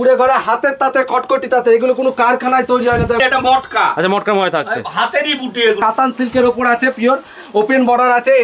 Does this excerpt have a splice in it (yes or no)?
yes